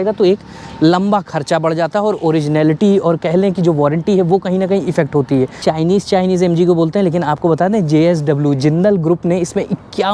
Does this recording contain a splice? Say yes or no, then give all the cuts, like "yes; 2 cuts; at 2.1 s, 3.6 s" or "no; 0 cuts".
yes; 1 cut; at 5.6 s